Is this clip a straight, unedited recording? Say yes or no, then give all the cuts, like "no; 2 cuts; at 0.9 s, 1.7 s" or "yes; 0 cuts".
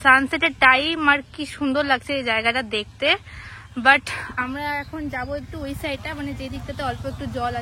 yes; 0 cuts